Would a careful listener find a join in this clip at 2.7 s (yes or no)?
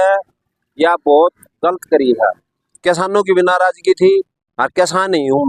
yes